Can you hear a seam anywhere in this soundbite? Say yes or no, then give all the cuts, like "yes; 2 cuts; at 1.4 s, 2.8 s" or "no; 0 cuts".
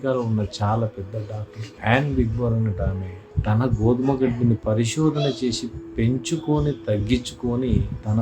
yes; 1 cut; at 3.3 s